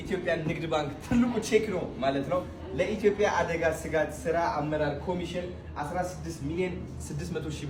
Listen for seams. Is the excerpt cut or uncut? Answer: uncut